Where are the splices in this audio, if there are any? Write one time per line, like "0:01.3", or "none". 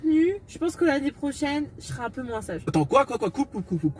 0:02.7